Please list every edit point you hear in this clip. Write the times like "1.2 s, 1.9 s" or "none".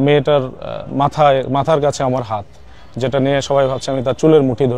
none